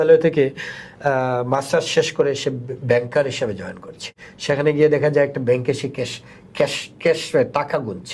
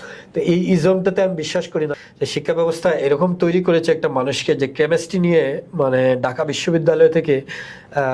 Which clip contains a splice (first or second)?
second